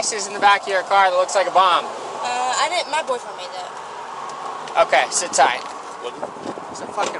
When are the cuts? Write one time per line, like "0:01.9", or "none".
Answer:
none

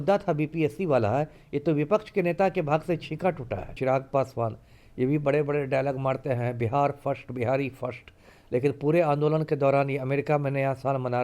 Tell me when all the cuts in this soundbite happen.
0:03.8

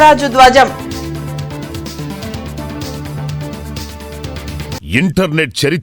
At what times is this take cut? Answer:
0:04.8

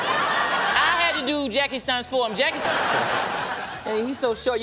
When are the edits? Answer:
0:02.6

